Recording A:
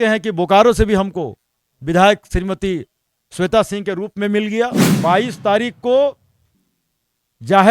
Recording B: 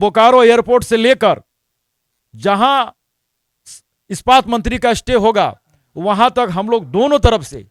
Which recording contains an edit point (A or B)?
A